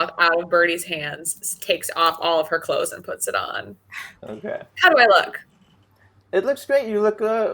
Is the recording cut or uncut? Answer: uncut